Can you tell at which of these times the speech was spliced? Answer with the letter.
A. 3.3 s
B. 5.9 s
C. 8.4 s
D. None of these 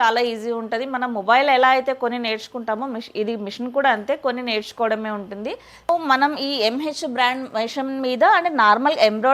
B